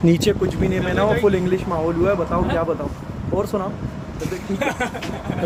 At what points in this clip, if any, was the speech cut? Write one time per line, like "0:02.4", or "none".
none

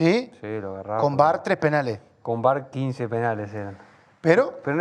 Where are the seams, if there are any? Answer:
none

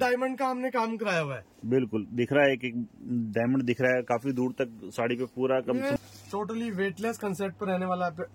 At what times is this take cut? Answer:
0:06.0

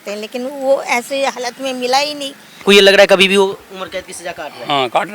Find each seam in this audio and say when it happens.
0:02.6

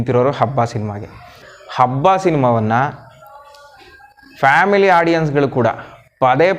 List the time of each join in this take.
0:01.4

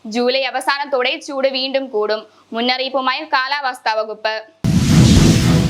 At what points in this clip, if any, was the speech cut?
0:04.5

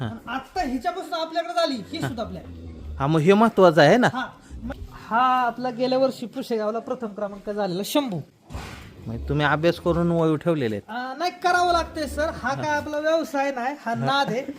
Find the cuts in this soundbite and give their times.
0:04.8
0:08.3

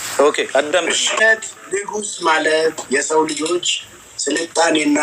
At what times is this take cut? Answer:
0:01.2

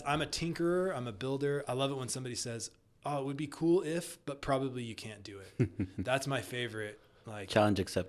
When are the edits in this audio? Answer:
0:01.6

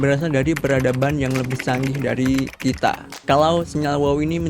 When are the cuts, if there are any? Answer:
0:03.1

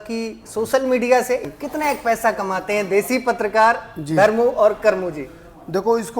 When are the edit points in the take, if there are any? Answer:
0:01.5

